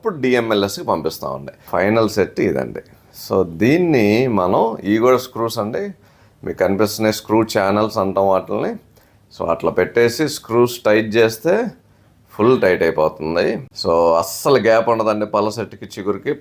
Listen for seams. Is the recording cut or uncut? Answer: cut